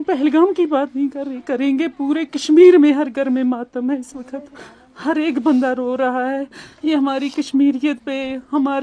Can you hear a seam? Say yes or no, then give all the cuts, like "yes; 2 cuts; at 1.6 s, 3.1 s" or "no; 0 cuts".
no; 0 cuts